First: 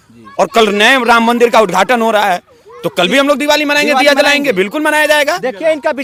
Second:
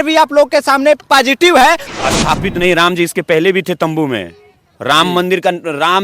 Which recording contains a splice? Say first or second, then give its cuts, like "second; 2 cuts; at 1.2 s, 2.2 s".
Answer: second; 1 cut; at 1.9 s